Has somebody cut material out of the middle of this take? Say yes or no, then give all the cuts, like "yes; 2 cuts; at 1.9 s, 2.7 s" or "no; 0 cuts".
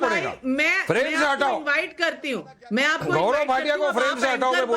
yes; 1 cut; at 2.2 s